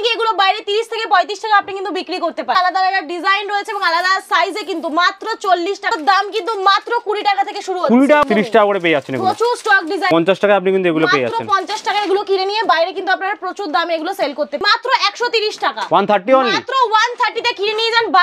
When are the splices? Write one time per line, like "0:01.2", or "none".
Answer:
0:02.6
0:05.9
0:08.2
0:10.1
0:14.6